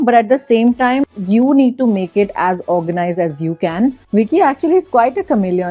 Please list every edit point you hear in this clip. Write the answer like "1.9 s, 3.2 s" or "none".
1.0 s, 4.0 s